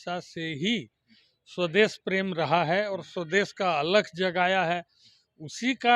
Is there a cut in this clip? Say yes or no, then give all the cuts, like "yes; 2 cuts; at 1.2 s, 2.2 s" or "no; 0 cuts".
no; 0 cuts